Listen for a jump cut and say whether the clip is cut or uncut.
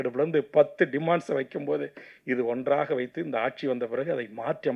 uncut